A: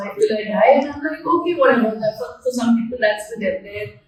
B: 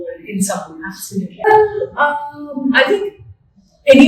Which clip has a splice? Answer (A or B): B